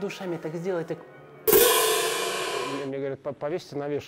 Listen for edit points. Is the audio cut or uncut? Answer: cut